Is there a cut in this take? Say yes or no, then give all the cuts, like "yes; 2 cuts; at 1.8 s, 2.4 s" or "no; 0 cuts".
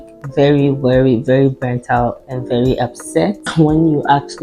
yes; 1 cut; at 3.5 s